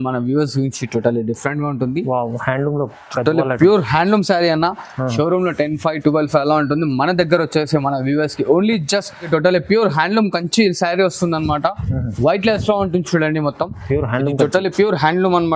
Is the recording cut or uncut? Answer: cut